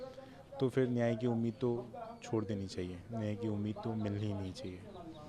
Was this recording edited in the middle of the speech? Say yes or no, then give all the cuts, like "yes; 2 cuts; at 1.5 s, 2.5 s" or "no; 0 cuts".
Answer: no; 0 cuts